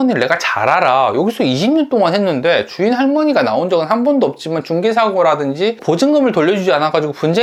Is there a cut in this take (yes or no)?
no